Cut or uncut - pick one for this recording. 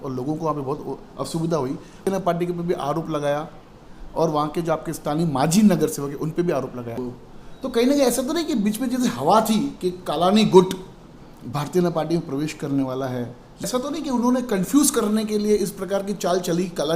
cut